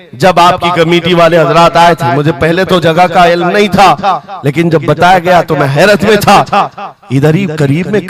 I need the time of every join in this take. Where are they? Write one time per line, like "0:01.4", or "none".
none